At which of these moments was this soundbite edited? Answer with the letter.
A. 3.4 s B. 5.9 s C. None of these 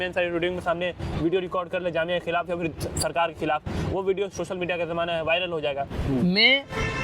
B